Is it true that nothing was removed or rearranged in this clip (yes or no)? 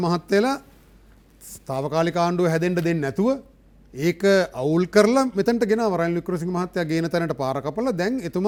yes